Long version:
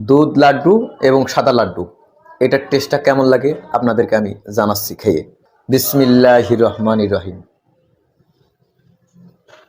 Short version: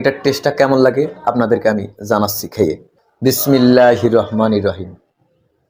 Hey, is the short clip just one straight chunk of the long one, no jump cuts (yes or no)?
yes